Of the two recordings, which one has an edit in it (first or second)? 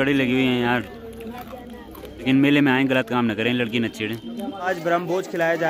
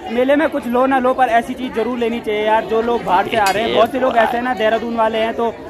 first